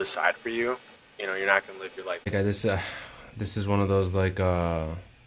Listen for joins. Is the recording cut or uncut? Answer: cut